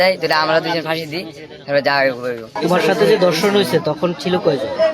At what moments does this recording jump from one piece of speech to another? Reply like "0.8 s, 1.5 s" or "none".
2.5 s